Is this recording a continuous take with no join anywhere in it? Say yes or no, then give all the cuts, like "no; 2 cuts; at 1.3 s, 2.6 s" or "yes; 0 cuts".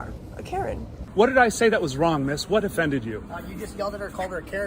no; 1 cut; at 1.0 s